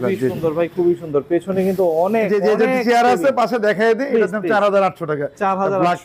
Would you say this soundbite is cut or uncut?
uncut